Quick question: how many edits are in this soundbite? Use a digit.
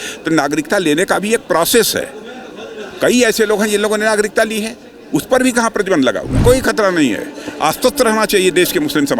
1